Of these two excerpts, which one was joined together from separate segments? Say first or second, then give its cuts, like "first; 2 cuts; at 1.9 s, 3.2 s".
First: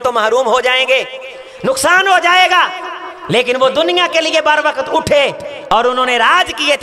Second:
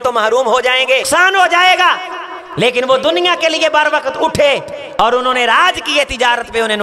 second; 1 cut; at 1.1 s